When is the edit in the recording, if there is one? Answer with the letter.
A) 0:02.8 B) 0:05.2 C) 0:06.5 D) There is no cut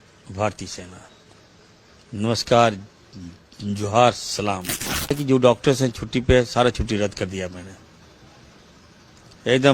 B